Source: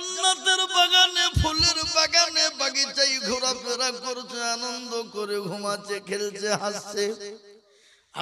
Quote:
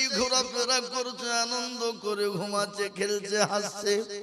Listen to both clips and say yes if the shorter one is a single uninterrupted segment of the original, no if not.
yes